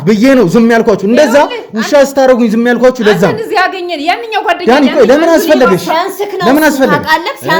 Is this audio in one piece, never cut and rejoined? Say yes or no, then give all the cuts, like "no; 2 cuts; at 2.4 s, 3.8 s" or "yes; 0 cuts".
yes; 0 cuts